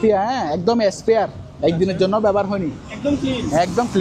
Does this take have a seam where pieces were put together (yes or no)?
no